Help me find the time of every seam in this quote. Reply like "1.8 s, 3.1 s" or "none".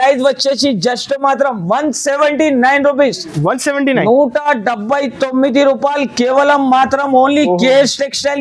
none